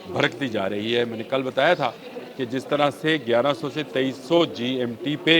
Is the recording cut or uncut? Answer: uncut